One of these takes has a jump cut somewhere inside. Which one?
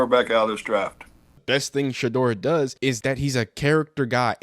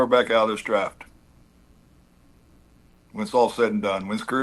first; 2 cuts; at 1.4 s, 2.9 s

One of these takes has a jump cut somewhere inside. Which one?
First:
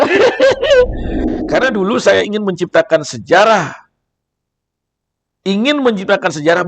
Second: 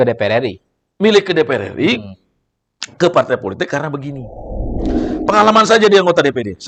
first; 1 cut; at 1.1 s

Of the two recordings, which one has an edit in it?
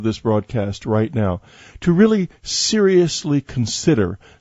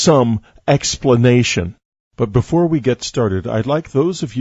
second; 1 cut; at 3.2 s

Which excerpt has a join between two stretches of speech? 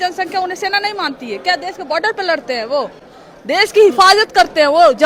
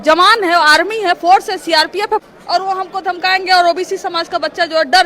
second; 1 cut; at 2.3 s

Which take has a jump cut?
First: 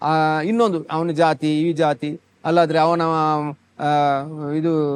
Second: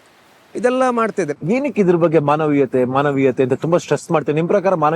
second; 1 cut; at 1.3 s

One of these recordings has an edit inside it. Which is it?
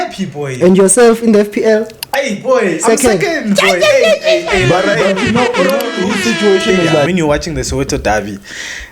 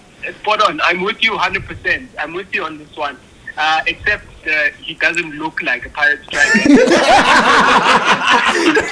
first; 1 cut; at 7.1 s

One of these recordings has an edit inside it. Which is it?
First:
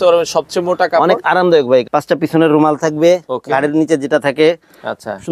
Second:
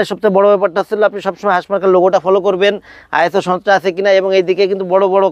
first; 1 cut; at 1.8 s

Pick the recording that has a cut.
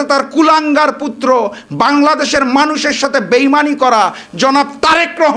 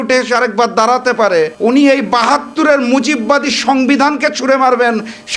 second; 1 cut; at 1.5 s

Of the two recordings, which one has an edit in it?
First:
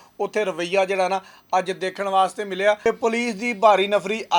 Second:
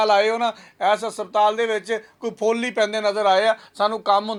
first; 1 cut; at 2.8 s

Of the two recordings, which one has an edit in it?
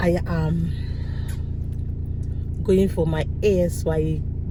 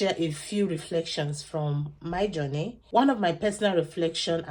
second; 1 cut; at 2.8 s

